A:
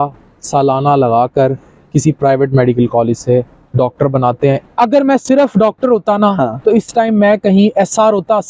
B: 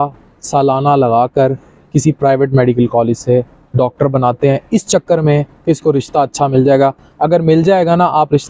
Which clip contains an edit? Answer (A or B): A